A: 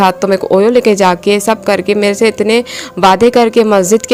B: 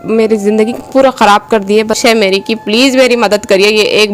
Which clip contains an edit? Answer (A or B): B